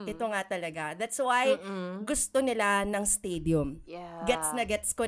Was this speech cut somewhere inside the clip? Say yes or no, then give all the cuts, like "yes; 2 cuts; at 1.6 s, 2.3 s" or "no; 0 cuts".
no; 0 cuts